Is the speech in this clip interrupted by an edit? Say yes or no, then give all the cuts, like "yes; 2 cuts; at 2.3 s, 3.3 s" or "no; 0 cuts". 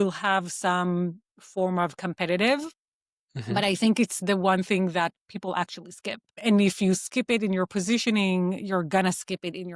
yes; 1 cut; at 6.4 s